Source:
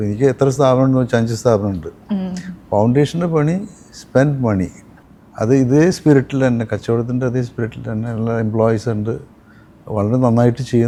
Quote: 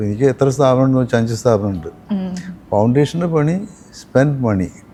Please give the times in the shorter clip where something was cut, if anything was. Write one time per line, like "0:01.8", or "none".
none